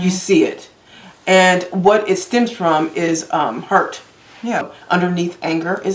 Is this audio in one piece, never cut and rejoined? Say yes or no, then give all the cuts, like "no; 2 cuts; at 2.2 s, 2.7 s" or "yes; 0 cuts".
no; 1 cut; at 4.7 s